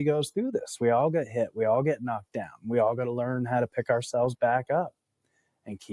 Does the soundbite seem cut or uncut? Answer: uncut